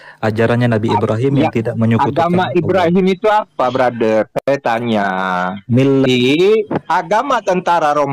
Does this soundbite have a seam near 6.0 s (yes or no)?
yes